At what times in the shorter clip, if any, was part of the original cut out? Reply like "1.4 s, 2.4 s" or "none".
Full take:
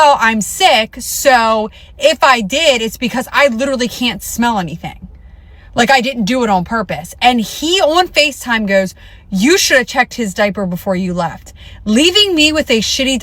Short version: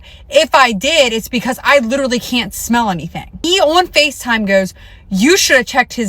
3.3 s